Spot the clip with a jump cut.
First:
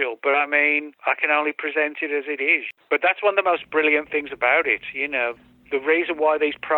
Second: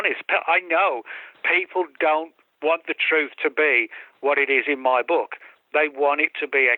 first; 2 cuts; at 0.9 s, 2.7 s

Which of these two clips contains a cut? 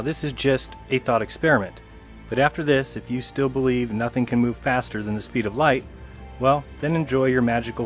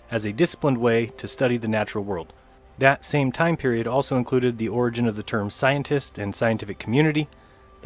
second; 1 cut; at 4.1 s

